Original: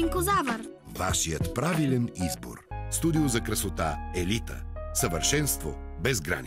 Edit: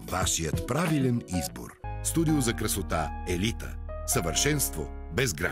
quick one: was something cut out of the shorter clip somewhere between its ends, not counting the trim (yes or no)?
no